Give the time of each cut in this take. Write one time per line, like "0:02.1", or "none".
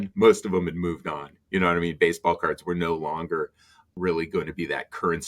0:03.8